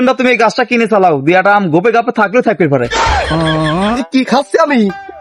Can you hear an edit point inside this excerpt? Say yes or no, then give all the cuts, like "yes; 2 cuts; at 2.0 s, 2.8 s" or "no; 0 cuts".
yes; 1 cut; at 4.0 s